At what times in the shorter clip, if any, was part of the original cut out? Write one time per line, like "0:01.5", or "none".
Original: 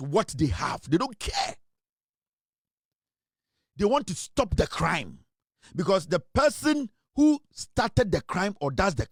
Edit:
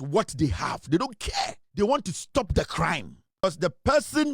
0:01.6
0:03.4